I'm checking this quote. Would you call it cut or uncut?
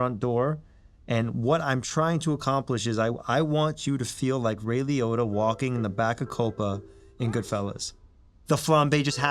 cut